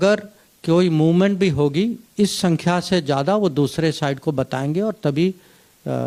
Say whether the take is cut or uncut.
uncut